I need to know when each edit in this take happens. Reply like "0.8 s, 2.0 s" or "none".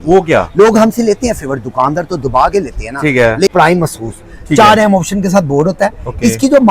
3.5 s

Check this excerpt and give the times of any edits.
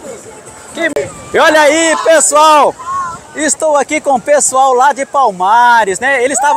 0.9 s

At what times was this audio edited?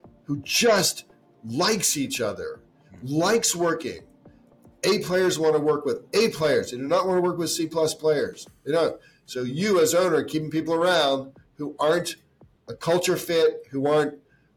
none

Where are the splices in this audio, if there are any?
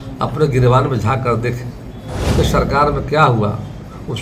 2.3 s

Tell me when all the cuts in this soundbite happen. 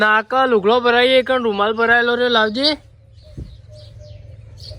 none

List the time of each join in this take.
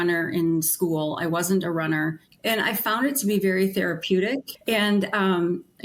2.3 s, 4.5 s

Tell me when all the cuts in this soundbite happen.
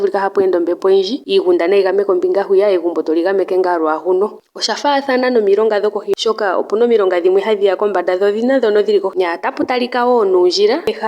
1.2 s, 4.5 s, 9.1 s

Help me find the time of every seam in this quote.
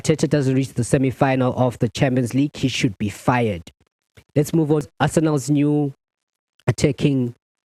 none

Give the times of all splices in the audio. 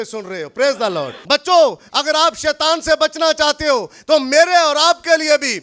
1.1 s

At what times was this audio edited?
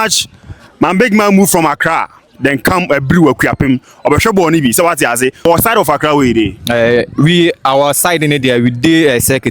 5.4 s

